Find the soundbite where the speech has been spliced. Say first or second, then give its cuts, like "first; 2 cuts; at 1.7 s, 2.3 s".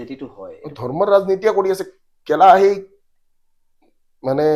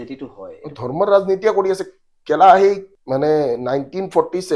second; 1 cut; at 2.9 s